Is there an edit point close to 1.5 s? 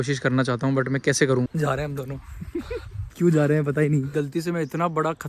yes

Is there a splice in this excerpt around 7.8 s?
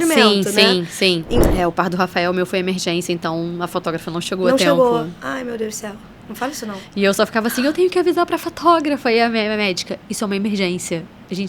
no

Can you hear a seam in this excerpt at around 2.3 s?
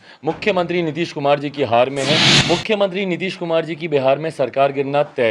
yes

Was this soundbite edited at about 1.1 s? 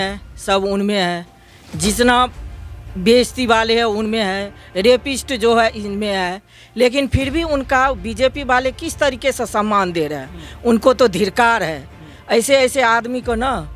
no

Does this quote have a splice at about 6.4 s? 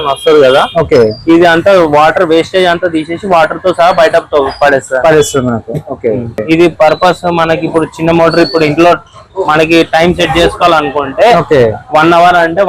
yes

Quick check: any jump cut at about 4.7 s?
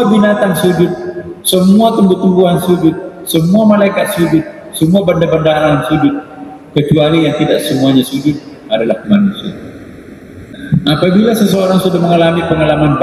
no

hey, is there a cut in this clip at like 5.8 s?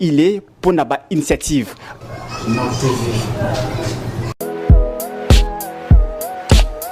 no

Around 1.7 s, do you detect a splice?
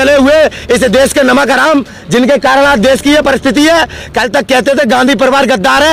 no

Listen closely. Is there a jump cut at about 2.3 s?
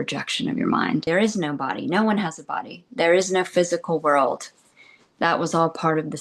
no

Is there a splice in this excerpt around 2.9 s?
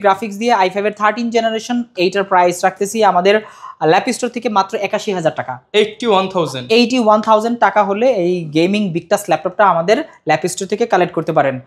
no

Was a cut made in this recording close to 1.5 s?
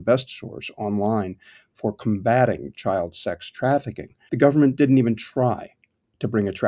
no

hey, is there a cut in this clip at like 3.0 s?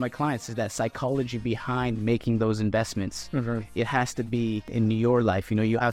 no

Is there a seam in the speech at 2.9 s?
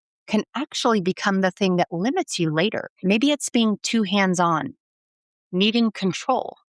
yes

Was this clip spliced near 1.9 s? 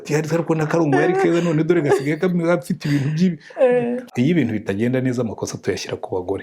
no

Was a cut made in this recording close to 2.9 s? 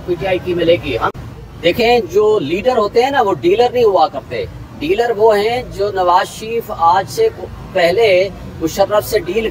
no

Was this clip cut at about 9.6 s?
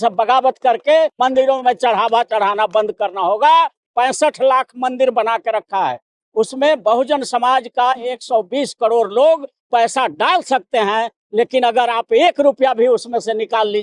no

